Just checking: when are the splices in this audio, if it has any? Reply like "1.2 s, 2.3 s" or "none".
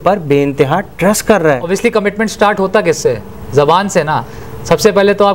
1.6 s